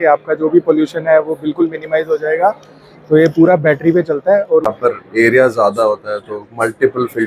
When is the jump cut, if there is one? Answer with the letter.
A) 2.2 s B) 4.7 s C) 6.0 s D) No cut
B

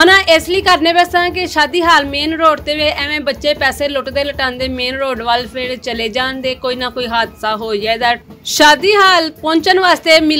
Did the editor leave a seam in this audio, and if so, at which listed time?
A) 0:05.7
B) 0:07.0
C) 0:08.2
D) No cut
C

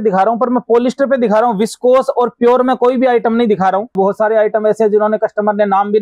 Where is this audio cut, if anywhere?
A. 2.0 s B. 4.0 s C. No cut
B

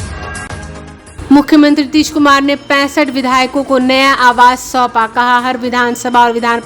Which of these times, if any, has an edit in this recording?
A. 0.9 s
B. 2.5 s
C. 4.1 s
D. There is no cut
A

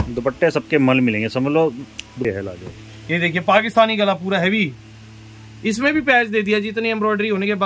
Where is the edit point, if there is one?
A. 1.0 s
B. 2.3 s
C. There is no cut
B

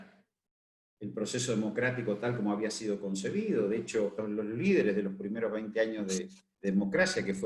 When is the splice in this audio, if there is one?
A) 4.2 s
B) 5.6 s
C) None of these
A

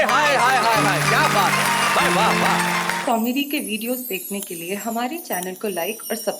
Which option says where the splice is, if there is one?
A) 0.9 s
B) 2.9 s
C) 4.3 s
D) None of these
B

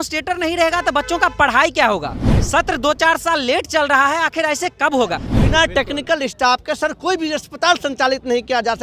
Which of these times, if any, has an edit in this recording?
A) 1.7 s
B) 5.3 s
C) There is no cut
B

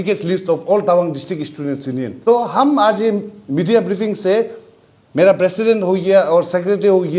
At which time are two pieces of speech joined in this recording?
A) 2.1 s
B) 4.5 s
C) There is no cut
A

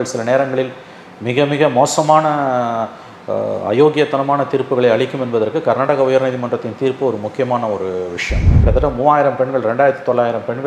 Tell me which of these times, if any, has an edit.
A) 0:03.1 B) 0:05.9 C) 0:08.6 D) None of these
C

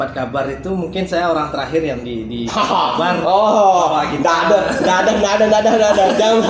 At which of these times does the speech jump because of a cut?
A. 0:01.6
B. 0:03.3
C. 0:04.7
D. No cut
D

